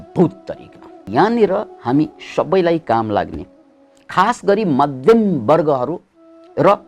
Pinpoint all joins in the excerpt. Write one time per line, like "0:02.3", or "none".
0:01.1